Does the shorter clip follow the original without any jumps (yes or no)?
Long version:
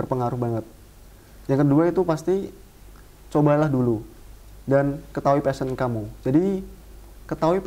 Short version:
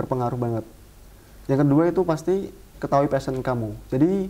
no